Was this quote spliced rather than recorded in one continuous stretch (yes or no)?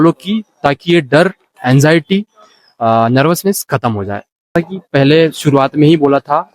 yes